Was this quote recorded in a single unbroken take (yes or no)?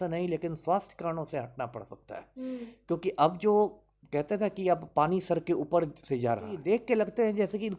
no